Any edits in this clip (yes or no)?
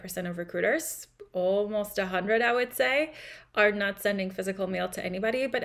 no